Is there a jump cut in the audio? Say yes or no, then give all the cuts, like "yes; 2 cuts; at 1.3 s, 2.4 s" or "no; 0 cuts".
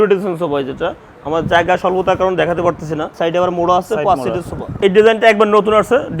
yes; 2 cuts; at 3.1 s, 4.8 s